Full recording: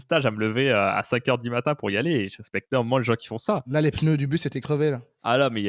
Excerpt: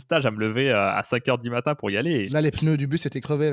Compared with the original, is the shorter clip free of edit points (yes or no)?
no